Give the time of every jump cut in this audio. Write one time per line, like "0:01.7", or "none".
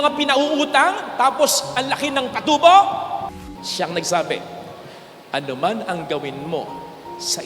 0:03.2